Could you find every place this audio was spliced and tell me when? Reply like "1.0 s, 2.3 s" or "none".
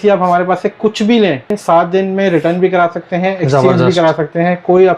1.6 s